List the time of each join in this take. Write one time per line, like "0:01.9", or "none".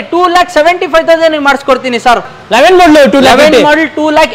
0:02.3